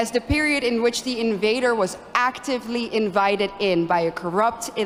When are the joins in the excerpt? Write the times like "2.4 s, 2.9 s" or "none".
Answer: none